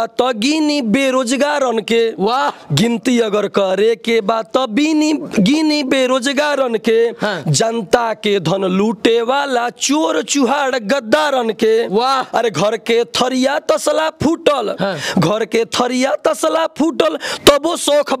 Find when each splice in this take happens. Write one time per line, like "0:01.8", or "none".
none

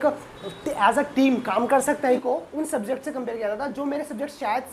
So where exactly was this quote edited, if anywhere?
0:02.2

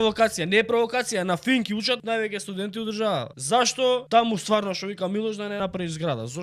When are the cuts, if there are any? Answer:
0:02.0
0:03.4
0:04.0
0:05.6

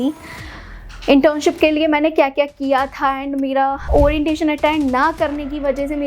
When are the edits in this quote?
0:03.9

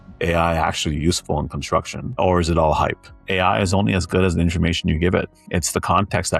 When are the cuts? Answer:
0:03.1
0:05.4

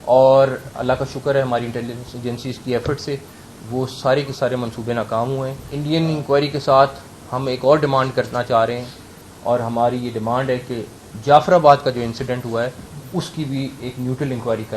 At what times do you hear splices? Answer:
0:05.6

